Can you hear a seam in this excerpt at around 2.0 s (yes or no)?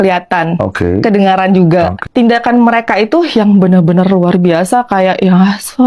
yes